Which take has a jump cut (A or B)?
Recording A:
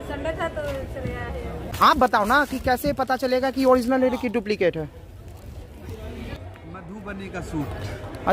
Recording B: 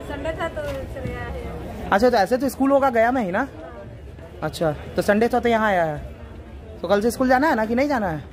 A